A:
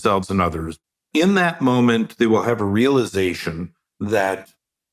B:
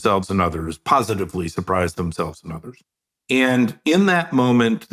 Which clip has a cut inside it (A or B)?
A